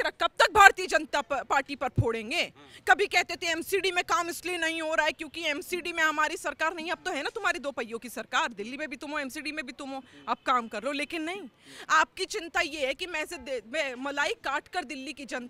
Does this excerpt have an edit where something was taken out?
no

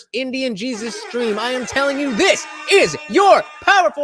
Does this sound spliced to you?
no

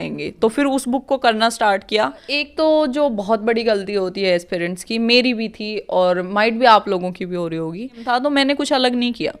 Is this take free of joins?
no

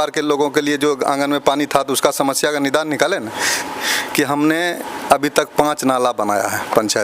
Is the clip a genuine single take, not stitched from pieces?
no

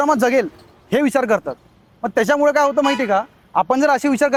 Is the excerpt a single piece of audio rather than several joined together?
yes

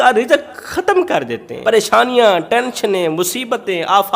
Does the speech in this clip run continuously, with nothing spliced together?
no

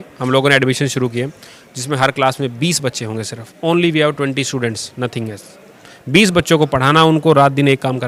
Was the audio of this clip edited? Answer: no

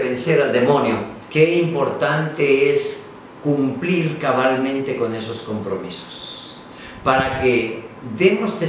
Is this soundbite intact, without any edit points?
no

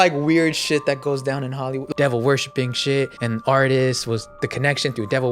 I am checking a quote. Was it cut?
yes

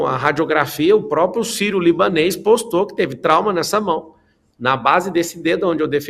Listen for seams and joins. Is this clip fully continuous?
yes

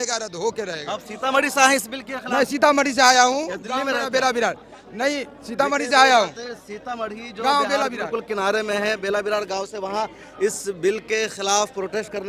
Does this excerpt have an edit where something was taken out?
no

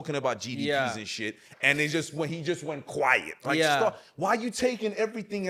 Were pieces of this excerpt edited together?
no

